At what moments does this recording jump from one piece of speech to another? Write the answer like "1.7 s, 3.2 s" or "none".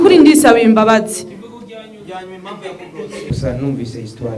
3.3 s